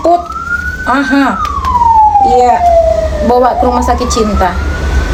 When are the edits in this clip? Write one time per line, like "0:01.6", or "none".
none